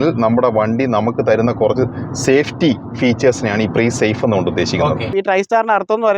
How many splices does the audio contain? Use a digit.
1